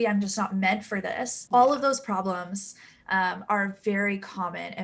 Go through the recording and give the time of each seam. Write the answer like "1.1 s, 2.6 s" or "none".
1.3 s